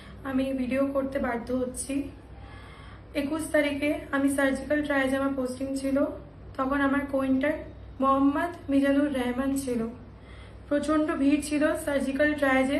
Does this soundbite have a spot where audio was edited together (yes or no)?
no